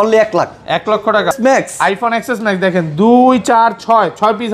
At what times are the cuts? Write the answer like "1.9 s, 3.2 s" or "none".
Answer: 1.3 s